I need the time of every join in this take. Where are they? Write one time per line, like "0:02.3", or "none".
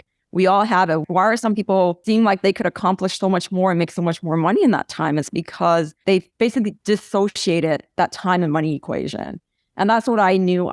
0:01.0